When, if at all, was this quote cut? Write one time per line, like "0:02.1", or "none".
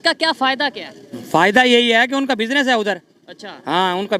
none